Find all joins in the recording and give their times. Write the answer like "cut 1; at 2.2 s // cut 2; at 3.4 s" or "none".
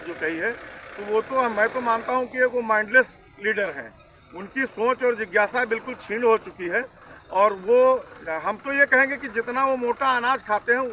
none